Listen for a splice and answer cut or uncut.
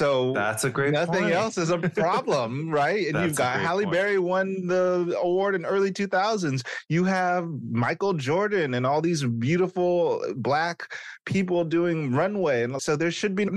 uncut